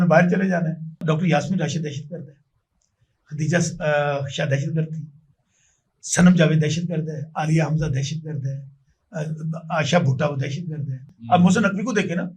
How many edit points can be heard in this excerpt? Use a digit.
2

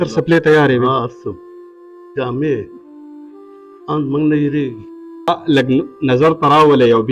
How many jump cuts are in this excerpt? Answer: 1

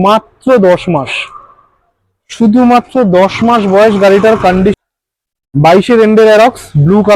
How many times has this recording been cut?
1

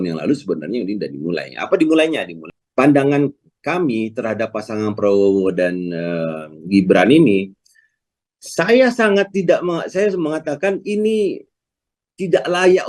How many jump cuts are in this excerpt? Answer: 1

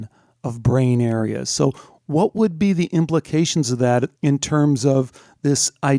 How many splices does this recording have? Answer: 1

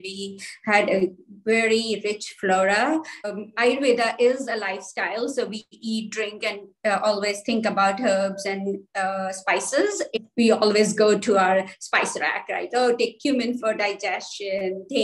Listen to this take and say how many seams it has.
2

